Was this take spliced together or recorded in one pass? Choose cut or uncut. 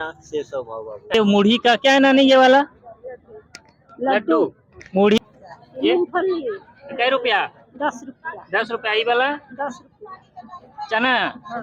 cut